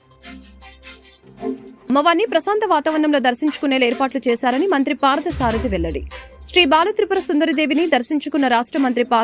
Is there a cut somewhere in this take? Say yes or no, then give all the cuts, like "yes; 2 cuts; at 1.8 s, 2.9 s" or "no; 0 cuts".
yes; 1 cut; at 1.0 s